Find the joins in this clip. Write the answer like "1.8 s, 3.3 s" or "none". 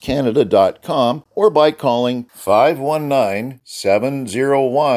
1.2 s